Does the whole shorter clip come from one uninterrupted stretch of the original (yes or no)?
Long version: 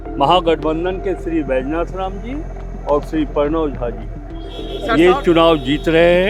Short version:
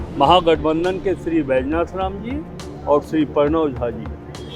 yes